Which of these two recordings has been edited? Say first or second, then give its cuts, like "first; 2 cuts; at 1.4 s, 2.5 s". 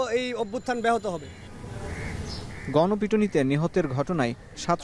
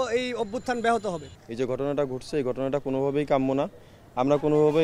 second; 1 cut; at 1.4 s